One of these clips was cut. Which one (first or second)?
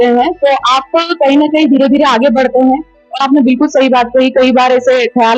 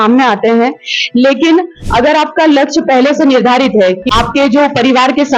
second